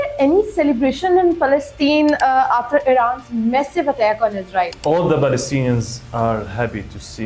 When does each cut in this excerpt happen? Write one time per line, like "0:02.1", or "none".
0:04.7